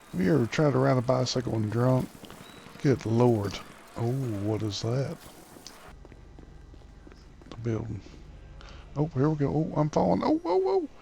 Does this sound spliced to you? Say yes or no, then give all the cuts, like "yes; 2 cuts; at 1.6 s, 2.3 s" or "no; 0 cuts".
yes; 1 cut; at 6.0 s